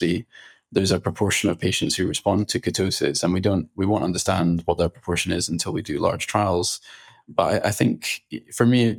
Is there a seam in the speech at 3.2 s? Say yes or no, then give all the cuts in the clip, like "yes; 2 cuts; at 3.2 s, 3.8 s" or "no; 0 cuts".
no; 0 cuts